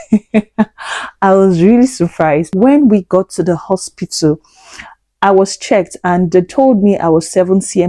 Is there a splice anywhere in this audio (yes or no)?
yes